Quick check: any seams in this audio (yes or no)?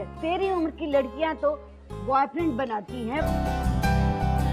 no